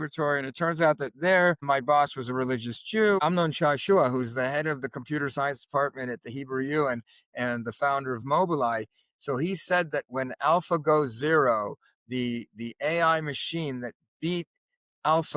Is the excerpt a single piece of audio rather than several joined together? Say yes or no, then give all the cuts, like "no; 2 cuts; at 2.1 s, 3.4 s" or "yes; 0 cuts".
no; 1 cut; at 3.2 s